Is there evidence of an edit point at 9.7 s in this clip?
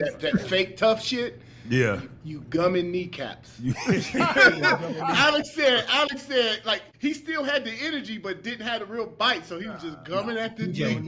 no; 1 cut; at 6.9 s

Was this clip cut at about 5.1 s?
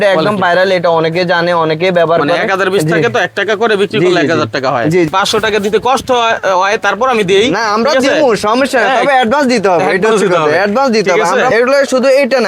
yes; 2 cuts; at 5.1 s, 11.5 s

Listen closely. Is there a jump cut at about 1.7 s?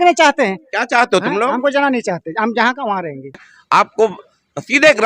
no; 1 cut; at 3.5 s

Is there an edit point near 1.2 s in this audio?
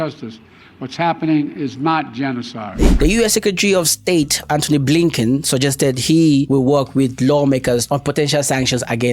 no; 1 cut; at 2.8 s

